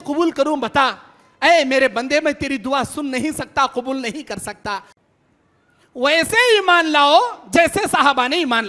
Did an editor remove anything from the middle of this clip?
yes; 1 cut; at 4.9 s

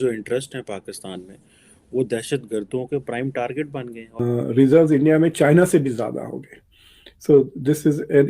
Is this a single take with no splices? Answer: no; 1 cut; at 4.2 s

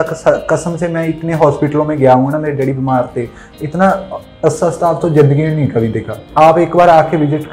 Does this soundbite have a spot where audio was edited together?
yes; 1 cut; at 6.2 s

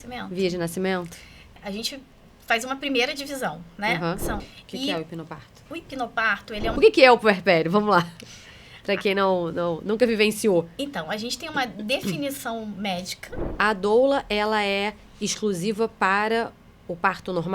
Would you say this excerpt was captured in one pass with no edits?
no; 4 cuts; at 1.6 s, 4.5 s, 6.7 s, 13.5 s

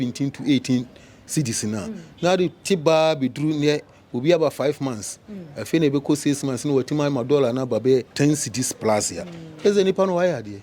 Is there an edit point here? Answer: yes; 1 cut; at 8.1 s

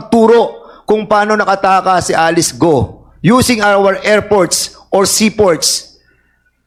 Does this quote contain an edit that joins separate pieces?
no; 0 cuts

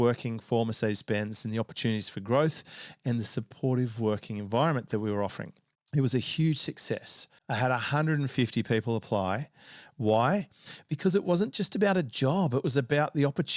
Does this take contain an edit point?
no; 0 cuts

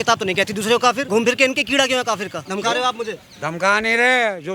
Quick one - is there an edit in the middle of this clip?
yes; 2 cuts; at 1.0 s, 2.4 s

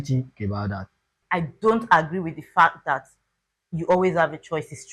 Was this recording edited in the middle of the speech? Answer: yes; 1 cut; at 1.2 s

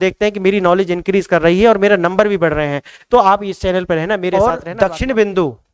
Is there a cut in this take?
yes; 1 cut; at 4.3 s

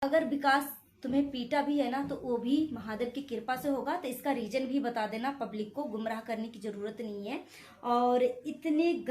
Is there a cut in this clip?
no; 0 cuts

